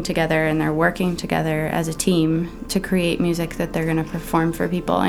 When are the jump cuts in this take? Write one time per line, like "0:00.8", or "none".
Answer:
none